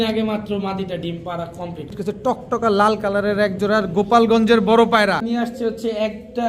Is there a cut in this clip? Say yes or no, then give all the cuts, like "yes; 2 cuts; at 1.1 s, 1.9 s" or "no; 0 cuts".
yes; 2 cuts; at 1.9 s, 5.2 s